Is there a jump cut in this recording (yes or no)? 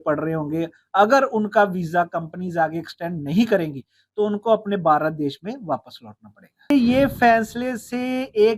yes